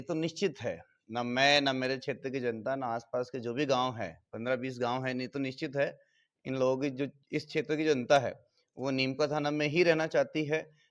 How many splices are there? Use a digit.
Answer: 0